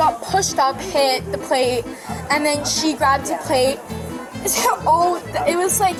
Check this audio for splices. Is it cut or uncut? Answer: uncut